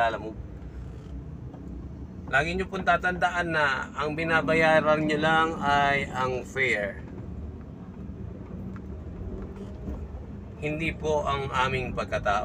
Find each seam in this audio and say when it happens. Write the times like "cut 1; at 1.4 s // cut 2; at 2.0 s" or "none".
none